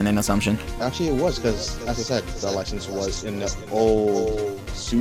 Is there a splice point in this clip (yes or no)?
no